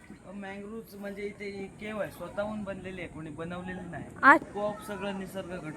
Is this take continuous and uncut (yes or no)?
no